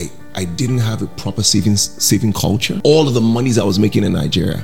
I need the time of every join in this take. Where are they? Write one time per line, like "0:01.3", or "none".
0:02.7